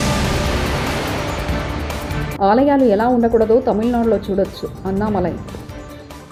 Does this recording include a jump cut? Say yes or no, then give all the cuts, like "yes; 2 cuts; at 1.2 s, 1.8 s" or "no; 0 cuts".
no; 0 cuts